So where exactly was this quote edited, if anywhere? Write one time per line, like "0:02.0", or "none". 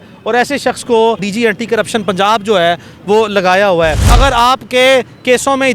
0:01.3
0:04.0